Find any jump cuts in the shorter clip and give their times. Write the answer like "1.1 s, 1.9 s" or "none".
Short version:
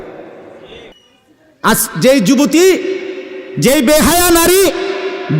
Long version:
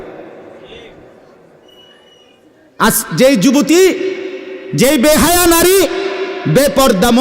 0.9 s